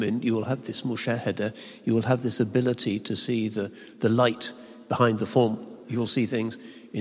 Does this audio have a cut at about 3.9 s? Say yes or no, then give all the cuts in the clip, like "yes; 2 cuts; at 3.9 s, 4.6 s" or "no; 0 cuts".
no; 1 cut; at 5.8 s